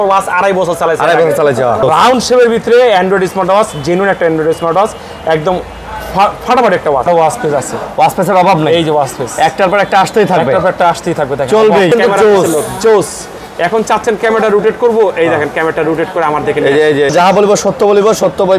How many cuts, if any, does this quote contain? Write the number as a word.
four